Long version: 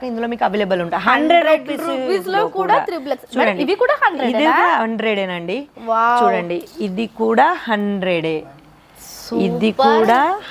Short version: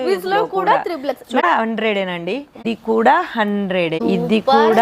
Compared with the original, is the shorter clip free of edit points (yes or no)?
no